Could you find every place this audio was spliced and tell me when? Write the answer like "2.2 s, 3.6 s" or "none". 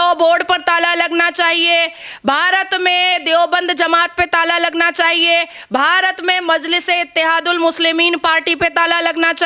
none